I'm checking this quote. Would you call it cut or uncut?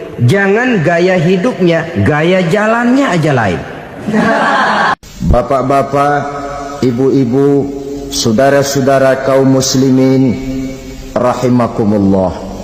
cut